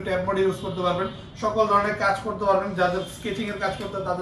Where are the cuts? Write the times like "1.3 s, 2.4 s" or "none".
none